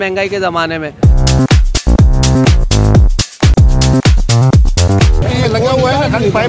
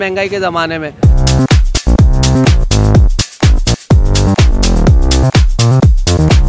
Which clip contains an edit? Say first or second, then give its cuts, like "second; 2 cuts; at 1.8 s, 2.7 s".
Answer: first; 2 cuts; at 3.5 s, 5.2 s